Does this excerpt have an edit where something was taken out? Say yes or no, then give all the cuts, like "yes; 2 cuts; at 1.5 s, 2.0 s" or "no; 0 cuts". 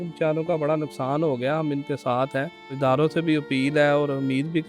yes; 1 cut; at 2.7 s